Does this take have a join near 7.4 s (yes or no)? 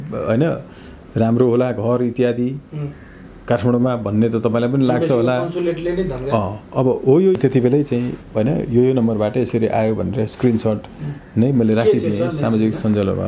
yes